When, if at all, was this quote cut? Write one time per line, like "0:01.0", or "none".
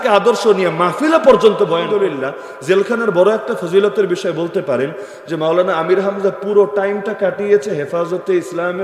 0:01.8